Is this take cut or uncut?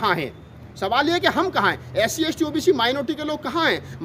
uncut